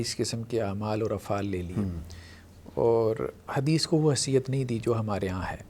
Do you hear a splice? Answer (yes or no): no